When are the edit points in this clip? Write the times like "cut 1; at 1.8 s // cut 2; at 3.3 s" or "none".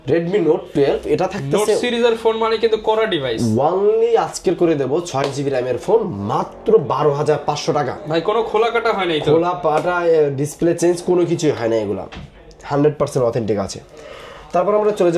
none